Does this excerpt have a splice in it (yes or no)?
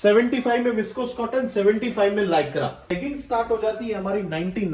yes